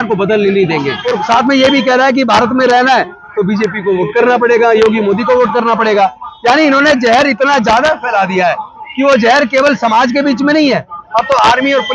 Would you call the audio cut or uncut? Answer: cut